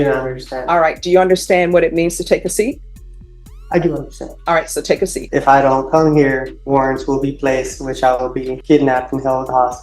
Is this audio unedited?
no; 3 cuts; at 5.2 s, 6.5 s, 8.5 s

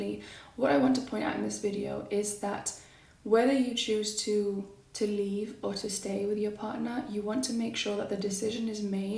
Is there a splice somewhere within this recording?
no; 0 cuts

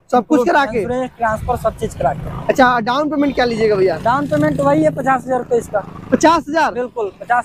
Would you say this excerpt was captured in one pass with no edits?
yes; 0 cuts

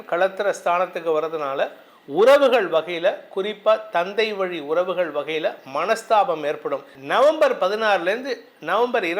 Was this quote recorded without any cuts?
no; 1 cut; at 6.9 s

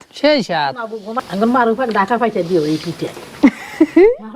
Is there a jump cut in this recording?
yes; 1 cut; at 1.2 s

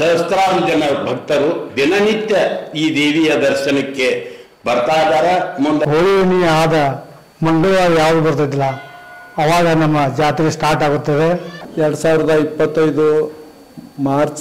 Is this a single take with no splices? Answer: no; 1 cut; at 5.8 s

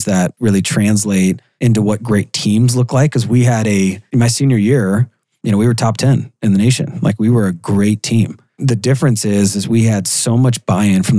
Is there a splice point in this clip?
yes; 2 cuts; at 1.5 s, 8.5 s

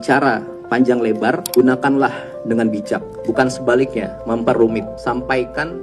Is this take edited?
yes; 4 cuts; at 1.4 s, 3.1 s, 4.1 s, 4.9 s

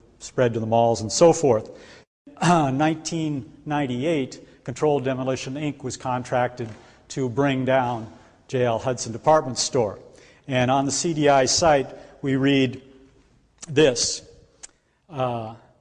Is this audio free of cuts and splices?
no; 1 cut; at 10.0 s

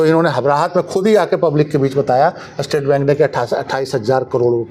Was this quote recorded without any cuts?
yes; 0 cuts

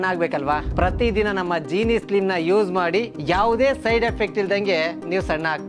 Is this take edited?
no; 0 cuts

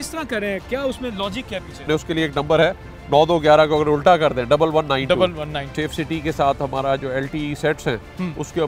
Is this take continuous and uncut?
no; 2 cuts; at 1.8 s, 5.7 s

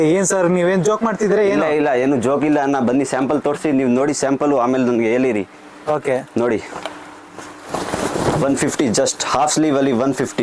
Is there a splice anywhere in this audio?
no; 0 cuts

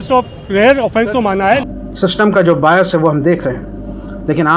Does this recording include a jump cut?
yes; 1 cut; at 1.7 s

